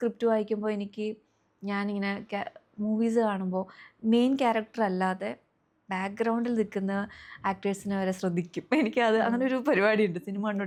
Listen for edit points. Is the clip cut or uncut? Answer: uncut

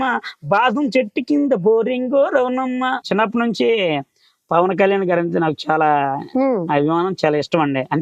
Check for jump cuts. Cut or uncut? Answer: cut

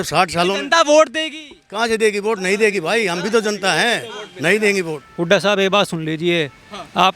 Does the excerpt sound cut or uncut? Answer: cut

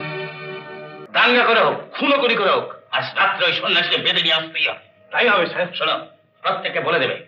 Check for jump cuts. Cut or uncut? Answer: cut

